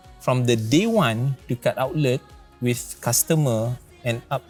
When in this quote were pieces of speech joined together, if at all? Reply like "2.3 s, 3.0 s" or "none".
none